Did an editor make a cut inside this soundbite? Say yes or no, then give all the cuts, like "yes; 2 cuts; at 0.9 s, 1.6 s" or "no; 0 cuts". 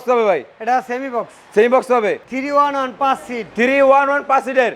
yes; 1 cut; at 2.3 s